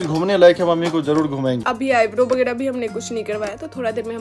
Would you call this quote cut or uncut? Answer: cut